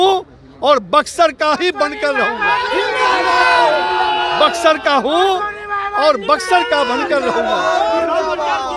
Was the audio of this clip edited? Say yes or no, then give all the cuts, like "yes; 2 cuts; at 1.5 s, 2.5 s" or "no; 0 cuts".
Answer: no; 0 cuts